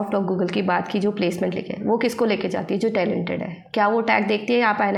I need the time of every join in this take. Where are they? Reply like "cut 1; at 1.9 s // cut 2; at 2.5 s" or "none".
none